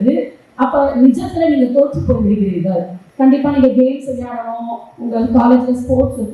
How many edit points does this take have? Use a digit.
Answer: 1